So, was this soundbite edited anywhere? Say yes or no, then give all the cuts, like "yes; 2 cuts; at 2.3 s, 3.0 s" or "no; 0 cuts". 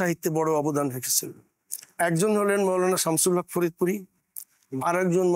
no; 0 cuts